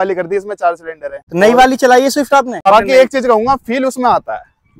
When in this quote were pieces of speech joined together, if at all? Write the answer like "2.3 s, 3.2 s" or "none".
1.2 s, 2.6 s